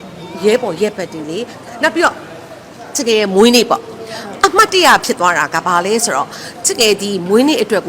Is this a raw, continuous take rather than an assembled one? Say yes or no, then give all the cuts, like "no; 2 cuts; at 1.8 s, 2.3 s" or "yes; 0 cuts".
no; 1 cut; at 1.6 s